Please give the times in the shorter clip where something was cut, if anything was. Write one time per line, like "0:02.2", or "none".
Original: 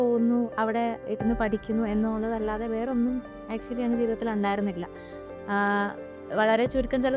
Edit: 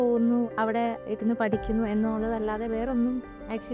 none